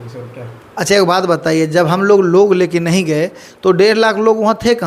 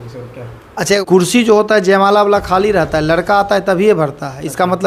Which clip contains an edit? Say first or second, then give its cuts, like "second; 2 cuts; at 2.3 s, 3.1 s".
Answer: second; 1 cut; at 1.0 s